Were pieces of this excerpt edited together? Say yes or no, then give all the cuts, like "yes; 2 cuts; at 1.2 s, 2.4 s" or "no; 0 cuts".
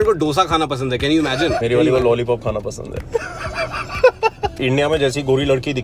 yes; 2 cuts; at 1.6 s, 4.5 s